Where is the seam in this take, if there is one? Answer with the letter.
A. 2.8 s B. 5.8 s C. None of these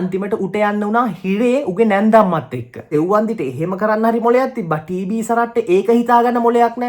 A